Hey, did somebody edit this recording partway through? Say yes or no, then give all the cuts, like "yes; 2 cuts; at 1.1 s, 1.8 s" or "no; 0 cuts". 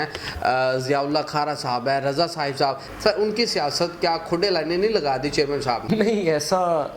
yes; 2 cuts; at 2.8 s, 5.9 s